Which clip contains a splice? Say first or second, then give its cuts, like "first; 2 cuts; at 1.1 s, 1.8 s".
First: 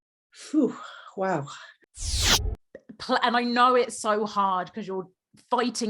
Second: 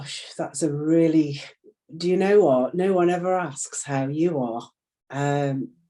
first; 1 cut; at 2.3 s